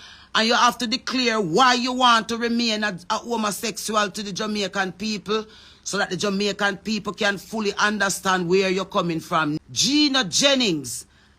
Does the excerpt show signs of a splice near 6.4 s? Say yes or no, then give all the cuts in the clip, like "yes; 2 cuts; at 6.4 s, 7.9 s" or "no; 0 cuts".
no; 1 cut; at 9.6 s